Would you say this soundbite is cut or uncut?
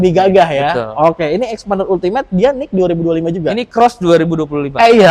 uncut